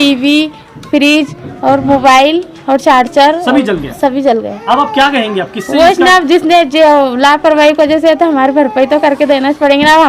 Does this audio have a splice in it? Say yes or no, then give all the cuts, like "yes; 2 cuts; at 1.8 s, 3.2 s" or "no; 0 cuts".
no; 0 cuts